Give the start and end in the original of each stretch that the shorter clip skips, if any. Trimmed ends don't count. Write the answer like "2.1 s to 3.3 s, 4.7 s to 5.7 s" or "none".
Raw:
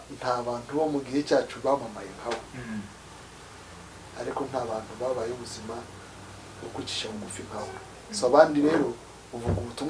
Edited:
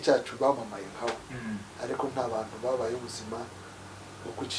2.9 s to 4.1 s